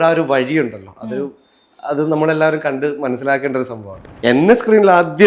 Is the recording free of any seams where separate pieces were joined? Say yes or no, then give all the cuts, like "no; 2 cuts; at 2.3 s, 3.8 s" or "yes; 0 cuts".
no; 1 cut; at 4.1 s